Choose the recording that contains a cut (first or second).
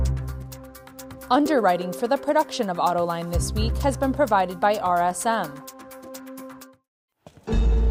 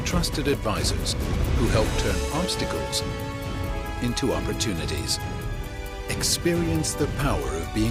first